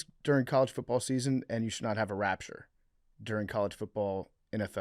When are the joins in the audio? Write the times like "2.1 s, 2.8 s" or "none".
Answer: none